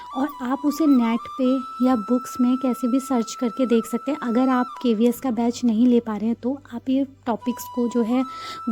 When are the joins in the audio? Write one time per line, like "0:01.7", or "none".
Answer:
none